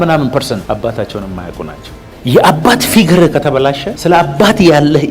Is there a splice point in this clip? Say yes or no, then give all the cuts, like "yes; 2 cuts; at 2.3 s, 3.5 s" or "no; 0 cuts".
yes; 2 cuts; at 1.9 s, 3.9 s